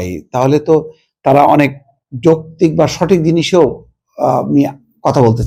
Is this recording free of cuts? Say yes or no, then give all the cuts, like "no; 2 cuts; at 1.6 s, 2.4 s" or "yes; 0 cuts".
yes; 0 cuts